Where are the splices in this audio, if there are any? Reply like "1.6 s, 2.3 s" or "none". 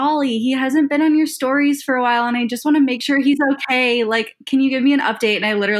none

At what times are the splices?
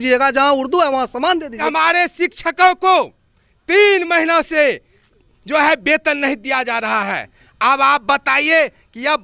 1.6 s

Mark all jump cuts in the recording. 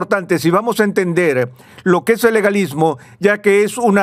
none

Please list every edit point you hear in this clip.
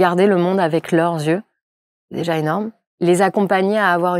2.9 s

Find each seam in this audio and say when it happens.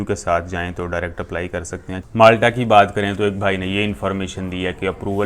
2.0 s

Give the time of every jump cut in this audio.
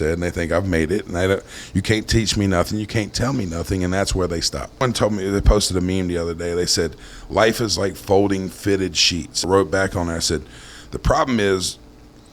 4.8 s, 9.4 s

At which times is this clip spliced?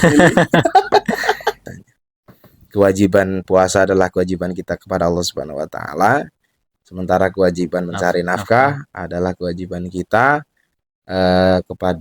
1.6 s

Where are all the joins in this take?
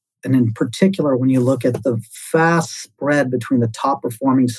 none

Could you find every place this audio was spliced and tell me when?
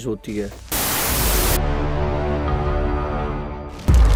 none

